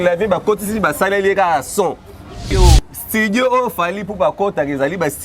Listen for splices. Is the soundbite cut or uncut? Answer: cut